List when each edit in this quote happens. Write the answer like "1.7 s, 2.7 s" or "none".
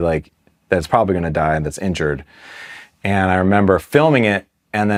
none

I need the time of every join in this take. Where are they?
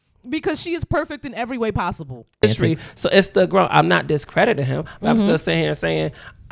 2.4 s

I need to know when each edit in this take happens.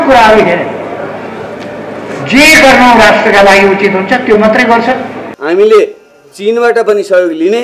5.3 s

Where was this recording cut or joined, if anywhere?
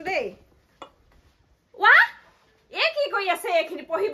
none

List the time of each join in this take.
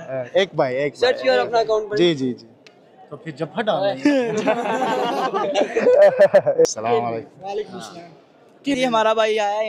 6.6 s, 8.7 s

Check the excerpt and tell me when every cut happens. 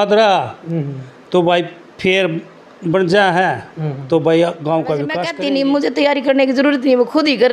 5.3 s

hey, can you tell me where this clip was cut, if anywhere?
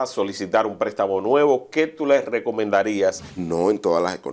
3.3 s

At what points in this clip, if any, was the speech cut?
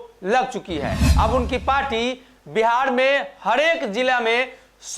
1.0 s

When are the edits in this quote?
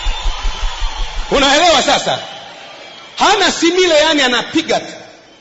2.8 s

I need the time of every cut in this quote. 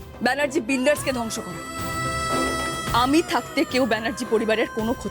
2.8 s

